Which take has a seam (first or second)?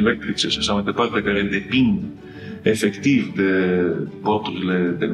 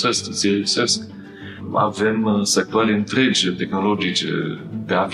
first